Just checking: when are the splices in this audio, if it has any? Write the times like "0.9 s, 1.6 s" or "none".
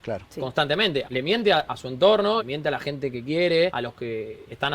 1.1 s, 2.5 s, 3.7 s